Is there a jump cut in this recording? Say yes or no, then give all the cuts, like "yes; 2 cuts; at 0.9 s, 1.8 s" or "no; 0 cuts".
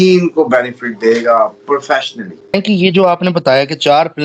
yes; 1 cut; at 2.5 s